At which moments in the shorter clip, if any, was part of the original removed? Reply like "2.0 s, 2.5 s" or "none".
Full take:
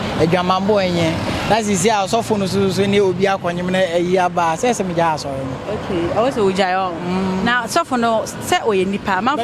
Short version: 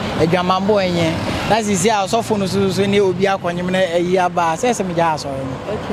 none